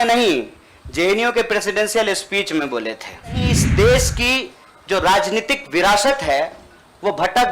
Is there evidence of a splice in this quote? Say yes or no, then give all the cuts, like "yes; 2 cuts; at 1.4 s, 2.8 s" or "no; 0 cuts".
yes; 1 cut; at 3.6 s